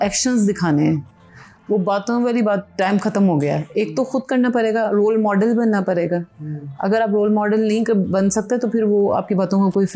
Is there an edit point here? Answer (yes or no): no